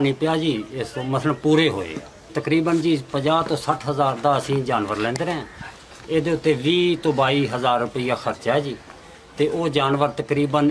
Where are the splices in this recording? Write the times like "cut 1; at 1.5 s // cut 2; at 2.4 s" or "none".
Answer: cut 1; at 2.3 s